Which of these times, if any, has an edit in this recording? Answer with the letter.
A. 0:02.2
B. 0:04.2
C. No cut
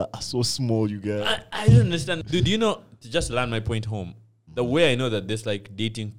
A